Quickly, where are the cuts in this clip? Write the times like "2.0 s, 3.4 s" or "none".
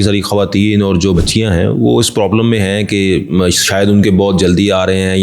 1.2 s